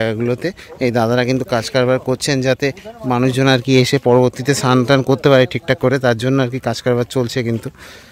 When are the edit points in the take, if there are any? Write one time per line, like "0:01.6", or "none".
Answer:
none